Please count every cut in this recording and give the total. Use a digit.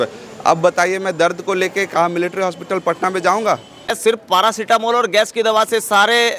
1